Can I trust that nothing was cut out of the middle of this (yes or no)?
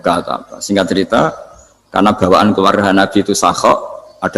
yes